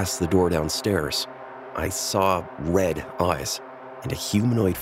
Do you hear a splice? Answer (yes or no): no